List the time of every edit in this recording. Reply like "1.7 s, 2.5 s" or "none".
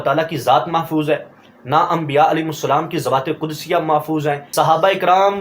4.4 s